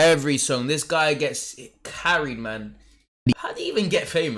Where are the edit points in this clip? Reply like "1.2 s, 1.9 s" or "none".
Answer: 3.4 s